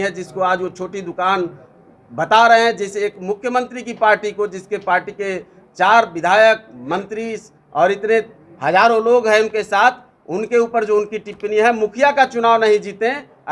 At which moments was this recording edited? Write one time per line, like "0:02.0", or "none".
none